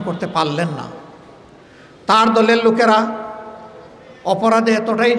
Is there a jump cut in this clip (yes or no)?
no